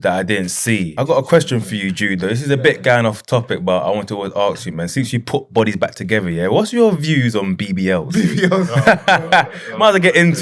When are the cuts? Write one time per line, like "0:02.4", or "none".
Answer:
0:00.9